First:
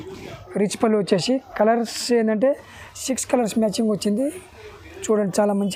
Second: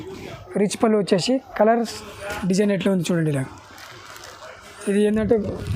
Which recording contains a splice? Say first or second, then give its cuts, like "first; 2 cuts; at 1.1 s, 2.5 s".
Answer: second; 1 cut; at 1.9 s